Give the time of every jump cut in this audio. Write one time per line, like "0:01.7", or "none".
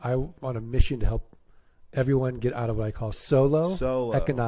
0:03.2